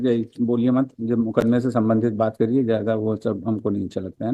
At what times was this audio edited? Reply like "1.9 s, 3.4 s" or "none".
none